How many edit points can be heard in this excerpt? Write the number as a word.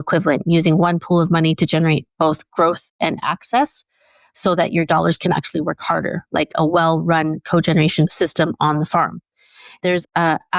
two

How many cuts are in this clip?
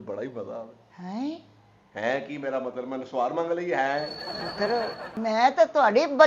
one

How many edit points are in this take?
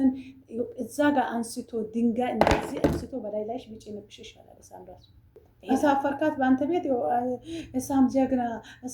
one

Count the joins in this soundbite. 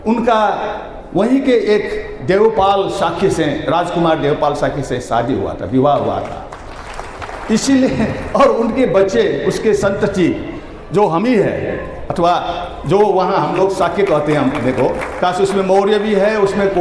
zero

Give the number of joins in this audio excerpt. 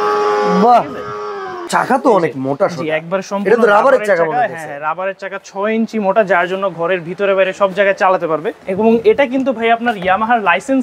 two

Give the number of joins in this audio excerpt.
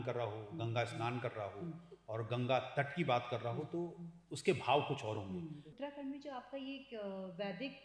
one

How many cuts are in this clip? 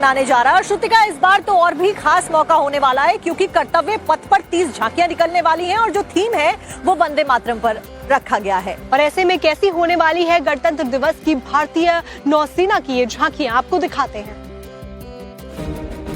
one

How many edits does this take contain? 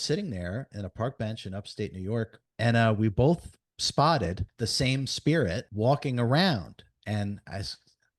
three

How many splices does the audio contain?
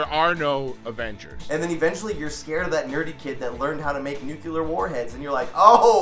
one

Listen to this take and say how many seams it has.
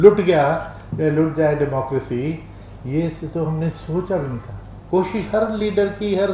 zero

